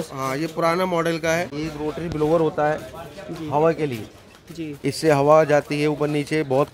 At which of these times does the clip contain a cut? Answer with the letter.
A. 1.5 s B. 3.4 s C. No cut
A